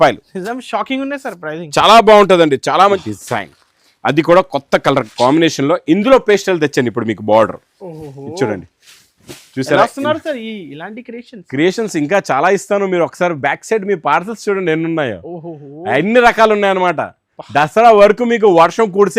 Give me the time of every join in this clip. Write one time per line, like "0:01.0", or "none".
0:03.1